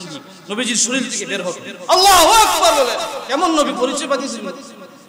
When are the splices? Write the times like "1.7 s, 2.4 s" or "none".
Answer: 3.2 s